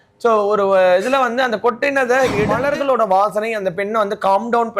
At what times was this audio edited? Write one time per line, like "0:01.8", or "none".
0:02.5